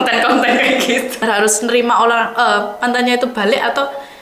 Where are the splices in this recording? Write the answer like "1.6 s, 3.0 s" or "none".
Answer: 1.2 s